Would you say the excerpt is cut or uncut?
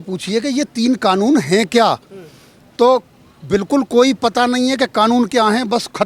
uncut